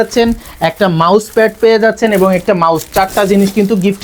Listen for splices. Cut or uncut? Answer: uncut